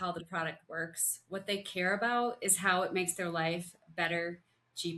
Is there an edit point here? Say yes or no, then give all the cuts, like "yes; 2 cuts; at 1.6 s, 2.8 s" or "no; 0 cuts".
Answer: no; 0 cuts